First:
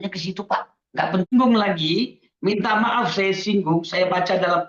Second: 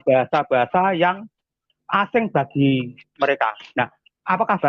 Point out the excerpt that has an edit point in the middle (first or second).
first